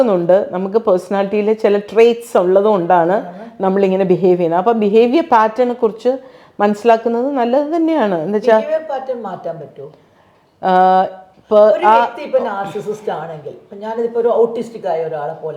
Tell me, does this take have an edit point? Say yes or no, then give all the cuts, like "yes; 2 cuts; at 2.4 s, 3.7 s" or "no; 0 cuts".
no; 0 cuts